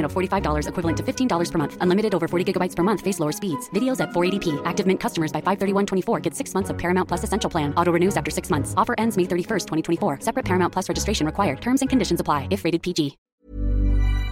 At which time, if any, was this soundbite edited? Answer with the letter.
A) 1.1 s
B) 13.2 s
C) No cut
B